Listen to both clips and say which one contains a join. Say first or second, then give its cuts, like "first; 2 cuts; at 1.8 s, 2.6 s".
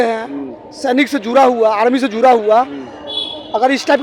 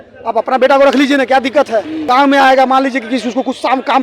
second; 1 cut; at 2.1 s